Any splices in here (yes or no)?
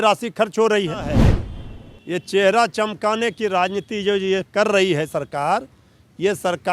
yes